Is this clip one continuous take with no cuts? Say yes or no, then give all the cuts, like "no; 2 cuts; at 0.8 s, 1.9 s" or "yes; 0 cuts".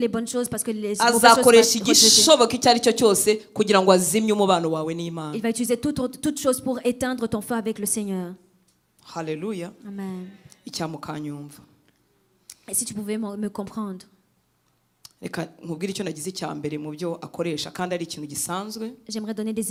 yes; 0 cuts